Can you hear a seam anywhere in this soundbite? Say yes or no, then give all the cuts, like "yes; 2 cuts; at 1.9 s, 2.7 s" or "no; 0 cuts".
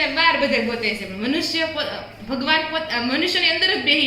no; 0 cuts